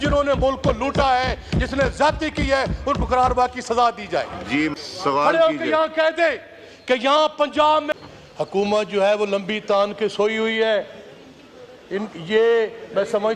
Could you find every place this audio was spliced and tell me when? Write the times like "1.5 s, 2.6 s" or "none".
4.8 s, 7.9 s